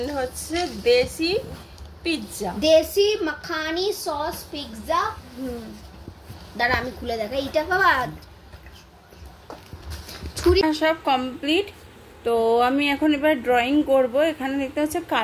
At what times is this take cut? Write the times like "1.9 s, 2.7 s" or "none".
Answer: 10.6 s

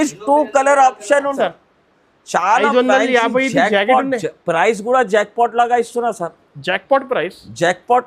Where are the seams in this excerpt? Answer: 1.4 s

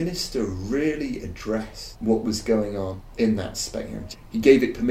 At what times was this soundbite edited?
1.8 s, 3.0 s, 4.0 s

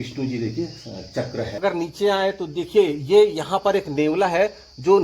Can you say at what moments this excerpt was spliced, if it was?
1.5 s

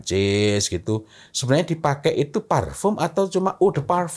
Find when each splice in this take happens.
none

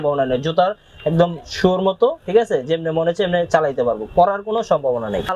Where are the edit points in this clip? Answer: none

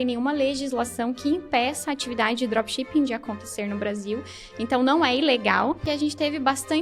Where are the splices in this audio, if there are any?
5.9 s

